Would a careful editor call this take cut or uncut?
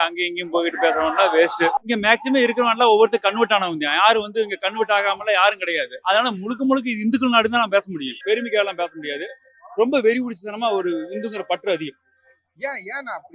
uncut